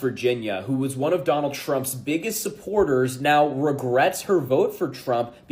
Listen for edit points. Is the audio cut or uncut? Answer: uncut